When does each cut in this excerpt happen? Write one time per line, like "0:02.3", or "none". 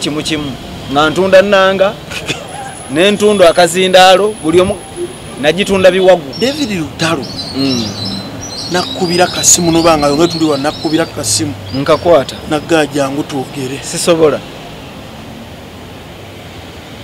0:06.3